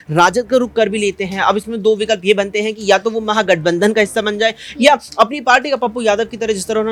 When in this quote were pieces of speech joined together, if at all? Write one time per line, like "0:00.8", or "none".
none